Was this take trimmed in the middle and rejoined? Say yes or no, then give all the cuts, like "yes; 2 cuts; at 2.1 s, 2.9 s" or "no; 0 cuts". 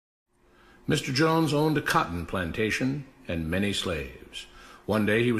yes; 1 cut; at 4.1 s